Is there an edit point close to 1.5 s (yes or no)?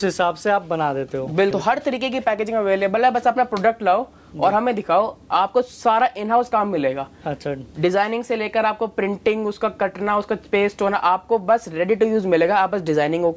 yes